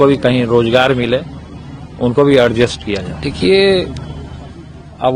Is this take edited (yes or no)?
yes